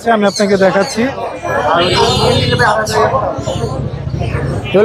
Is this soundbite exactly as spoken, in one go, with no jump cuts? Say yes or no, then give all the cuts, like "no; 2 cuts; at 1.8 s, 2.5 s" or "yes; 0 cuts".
no; 1 cut; at 1.3 s